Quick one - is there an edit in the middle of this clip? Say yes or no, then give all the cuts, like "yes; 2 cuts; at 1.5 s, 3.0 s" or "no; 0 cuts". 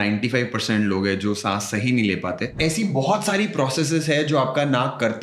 yes; 1 cut; at 2.6 s